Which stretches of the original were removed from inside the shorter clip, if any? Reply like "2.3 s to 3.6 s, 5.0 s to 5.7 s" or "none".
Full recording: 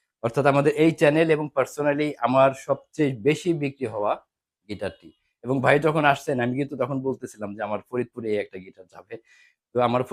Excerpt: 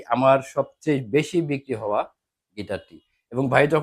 none